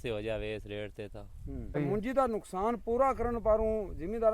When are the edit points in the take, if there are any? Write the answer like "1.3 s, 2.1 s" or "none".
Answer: 1.8 s